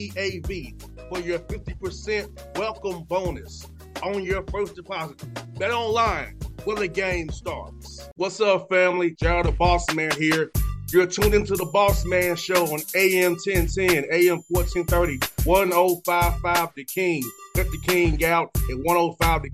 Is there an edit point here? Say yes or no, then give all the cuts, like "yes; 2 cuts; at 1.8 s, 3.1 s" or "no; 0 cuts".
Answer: no; 0 cuts